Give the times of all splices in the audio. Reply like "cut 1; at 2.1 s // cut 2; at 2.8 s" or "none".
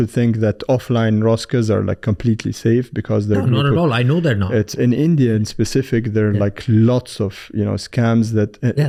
none